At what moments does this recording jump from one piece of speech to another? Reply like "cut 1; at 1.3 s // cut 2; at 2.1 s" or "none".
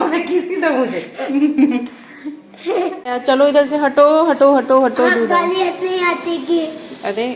cut 1; at 3.0 s